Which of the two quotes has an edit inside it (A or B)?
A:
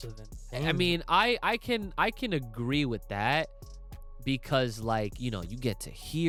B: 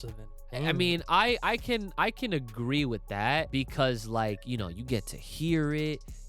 B